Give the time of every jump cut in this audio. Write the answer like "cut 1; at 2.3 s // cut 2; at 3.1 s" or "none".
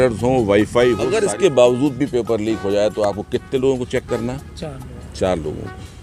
cut 1; at 1.0 s